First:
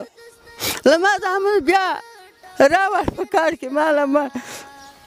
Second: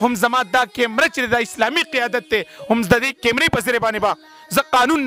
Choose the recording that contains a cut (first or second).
second